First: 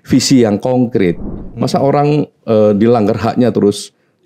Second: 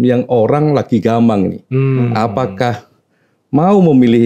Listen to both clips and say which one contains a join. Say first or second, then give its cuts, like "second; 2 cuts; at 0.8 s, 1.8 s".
first; 1 cut; at 1.2 s